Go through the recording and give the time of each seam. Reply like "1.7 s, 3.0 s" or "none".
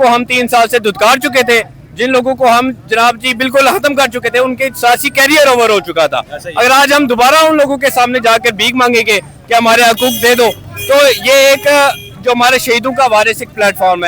none

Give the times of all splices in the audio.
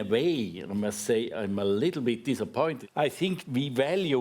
3.0 s

